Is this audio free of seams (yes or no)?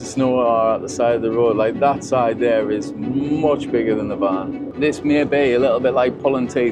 no